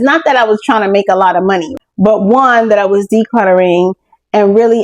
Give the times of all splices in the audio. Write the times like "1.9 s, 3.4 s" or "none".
1.7 s